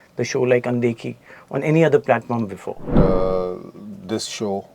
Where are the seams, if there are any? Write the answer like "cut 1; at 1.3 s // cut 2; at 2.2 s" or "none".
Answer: cut 1; at 2.9 s